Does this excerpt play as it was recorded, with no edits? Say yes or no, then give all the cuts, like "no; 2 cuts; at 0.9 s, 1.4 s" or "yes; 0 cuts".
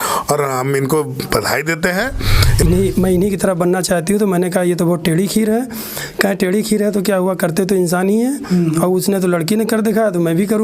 no; 1 cut; at 2.6 s